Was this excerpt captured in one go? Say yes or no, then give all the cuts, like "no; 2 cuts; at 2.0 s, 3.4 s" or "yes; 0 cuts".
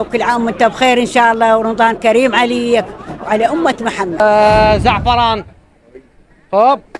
no; 1 cut; at 4.2 s